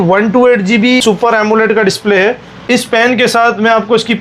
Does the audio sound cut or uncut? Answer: cut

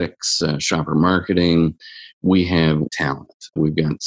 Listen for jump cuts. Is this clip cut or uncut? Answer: cut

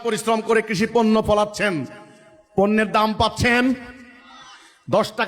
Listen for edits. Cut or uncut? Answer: uncut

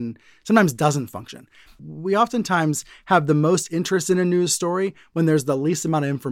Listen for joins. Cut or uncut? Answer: cut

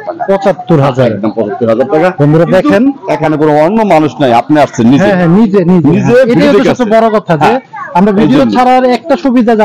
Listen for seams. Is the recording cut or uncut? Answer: uncut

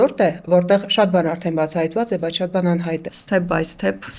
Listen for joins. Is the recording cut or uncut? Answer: cut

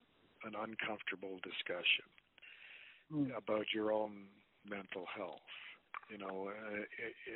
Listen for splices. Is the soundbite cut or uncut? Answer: uncut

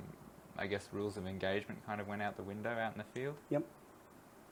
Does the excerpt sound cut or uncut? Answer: uncut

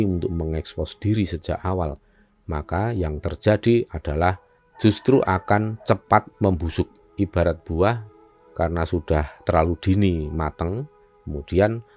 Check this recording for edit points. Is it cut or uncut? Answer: uncut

